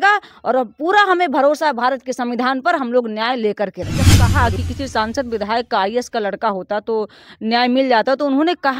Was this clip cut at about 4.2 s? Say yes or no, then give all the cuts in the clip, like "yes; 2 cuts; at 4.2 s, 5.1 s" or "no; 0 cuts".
yes; 1 cut; at 4.2 s